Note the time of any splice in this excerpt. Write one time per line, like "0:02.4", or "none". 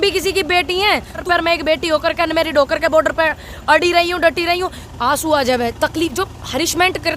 0:01.2
0:04.8